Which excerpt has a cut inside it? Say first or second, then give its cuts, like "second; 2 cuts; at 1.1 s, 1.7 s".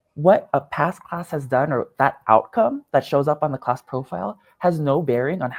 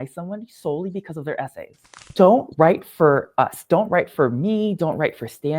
second; 2 cuts; at 2.0 s, 3.7 s